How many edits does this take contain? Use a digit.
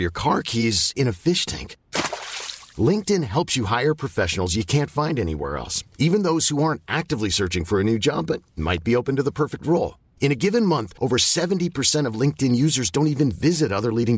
0